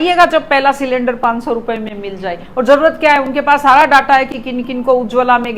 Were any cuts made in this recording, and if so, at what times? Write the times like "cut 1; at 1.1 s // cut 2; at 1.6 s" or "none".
none